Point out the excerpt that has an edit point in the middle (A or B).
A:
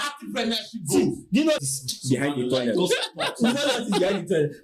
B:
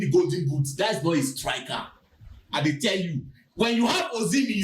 A